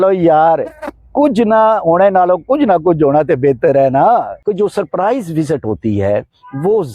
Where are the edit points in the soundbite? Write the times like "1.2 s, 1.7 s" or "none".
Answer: 4.4 s